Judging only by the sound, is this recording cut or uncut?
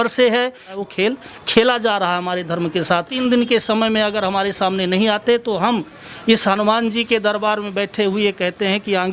cut